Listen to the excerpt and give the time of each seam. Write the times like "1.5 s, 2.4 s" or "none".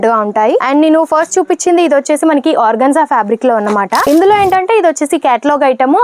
4.0 s